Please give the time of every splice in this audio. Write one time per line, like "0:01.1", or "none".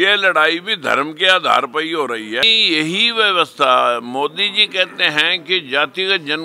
0:02.4